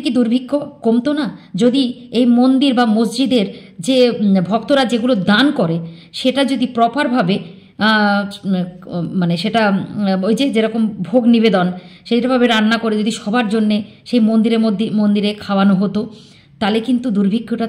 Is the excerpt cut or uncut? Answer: uncut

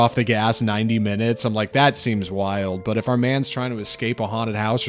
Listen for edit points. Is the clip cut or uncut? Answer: uncut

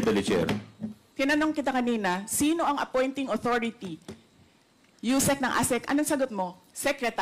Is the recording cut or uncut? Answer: cut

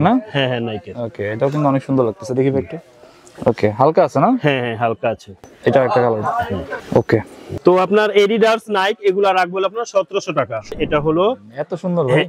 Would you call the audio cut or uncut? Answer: cut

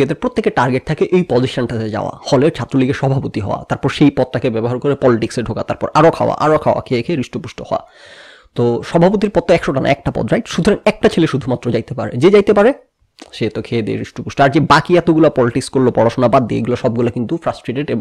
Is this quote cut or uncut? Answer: uncut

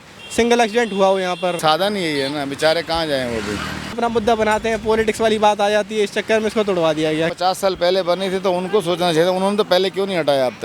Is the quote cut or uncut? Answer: cut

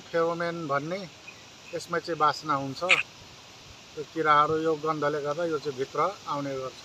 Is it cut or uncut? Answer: uncut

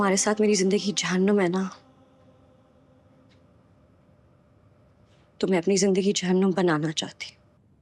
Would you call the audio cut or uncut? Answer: uncut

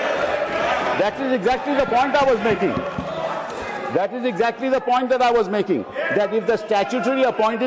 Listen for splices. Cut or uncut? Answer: uncut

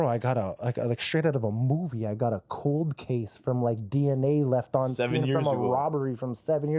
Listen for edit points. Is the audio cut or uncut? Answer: uncut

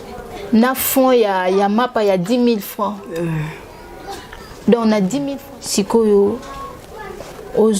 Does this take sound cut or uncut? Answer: cut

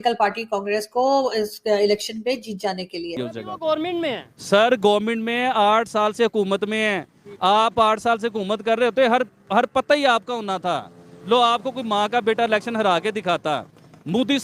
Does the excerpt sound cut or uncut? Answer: cut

